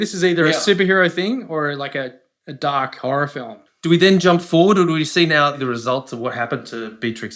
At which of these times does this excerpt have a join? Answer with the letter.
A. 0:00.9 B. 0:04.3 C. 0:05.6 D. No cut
C